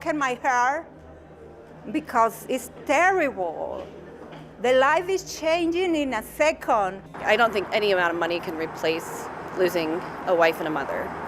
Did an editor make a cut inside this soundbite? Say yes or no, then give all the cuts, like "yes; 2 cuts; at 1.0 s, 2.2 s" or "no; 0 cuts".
yes; 1 cut; at 7.0 s